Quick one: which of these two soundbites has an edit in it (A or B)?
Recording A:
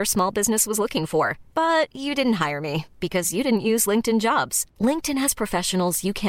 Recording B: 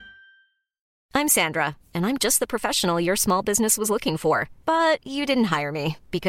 B